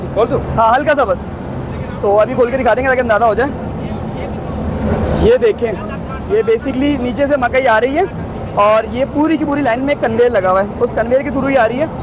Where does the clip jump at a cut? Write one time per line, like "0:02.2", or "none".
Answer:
none